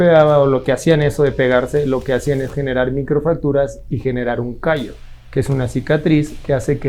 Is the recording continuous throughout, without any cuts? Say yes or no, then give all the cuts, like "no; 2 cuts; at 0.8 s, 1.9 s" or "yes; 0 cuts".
yes; 0 cuts